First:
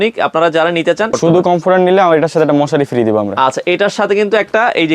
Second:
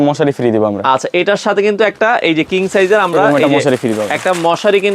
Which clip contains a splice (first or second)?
first